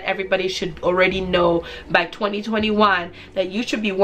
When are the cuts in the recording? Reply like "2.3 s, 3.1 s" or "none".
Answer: none